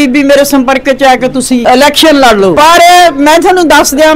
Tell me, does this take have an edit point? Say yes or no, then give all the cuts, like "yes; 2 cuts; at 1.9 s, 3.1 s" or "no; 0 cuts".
yes; 2 cuts; at 1.6 s, 2.5 s